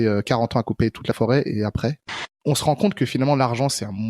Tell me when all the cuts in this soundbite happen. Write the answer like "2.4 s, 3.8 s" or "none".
2.3 s